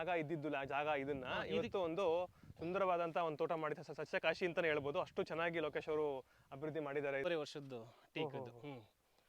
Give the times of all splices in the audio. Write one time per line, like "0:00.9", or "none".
0:07.2